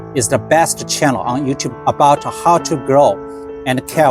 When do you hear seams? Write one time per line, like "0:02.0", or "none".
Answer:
0:01.7